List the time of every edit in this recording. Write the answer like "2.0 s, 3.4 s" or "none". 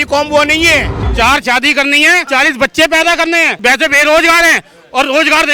1.0 s, 2.2 s, 3.5 s